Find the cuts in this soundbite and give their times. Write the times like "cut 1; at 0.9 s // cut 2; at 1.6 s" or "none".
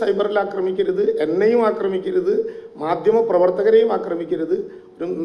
none